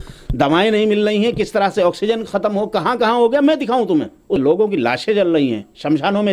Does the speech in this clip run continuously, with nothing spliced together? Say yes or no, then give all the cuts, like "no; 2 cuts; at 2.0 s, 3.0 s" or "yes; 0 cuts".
no; 1 cut; at 4.4 s